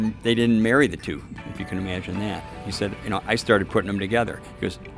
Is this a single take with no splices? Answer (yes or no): no